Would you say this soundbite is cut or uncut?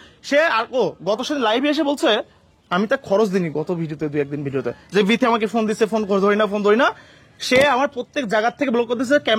cut